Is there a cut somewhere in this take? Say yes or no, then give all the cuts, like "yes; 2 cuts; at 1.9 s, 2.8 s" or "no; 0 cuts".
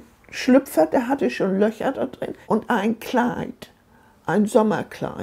yes; 1 cut; at 2.3 s